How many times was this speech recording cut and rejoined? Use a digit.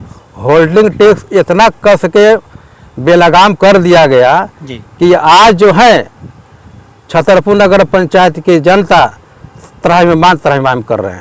0